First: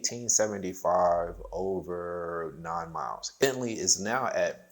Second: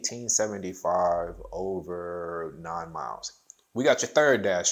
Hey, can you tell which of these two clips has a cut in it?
first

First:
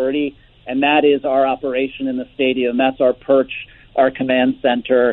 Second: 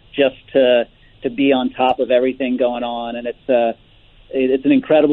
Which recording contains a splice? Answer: first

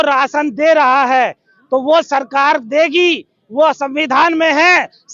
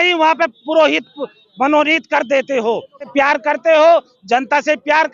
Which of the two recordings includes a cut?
second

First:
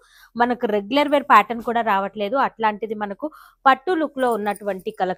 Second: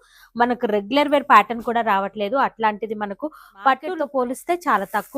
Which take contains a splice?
second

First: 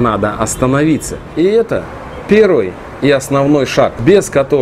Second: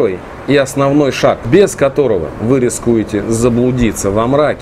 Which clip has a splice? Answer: first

